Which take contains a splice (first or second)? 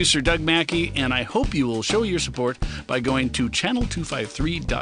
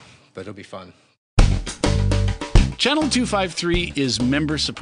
second